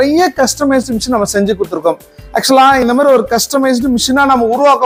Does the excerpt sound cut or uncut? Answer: uncut